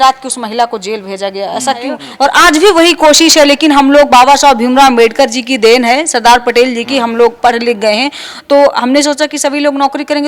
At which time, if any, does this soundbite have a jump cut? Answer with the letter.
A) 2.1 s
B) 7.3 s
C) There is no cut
A